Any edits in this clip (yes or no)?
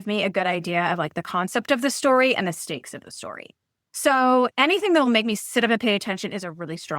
yes